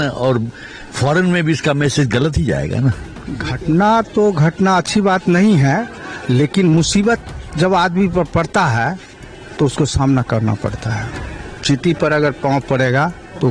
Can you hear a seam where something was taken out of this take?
yes; 1 cut; at 3.4 s

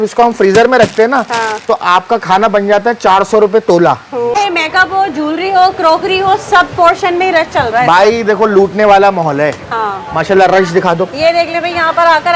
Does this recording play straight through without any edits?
no; 1 cut; at 4.3 s

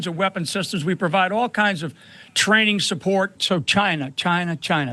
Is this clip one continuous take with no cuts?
no; 1 cut; at 3.4 s

